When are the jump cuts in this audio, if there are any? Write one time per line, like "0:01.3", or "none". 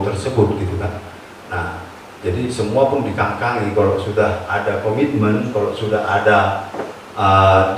none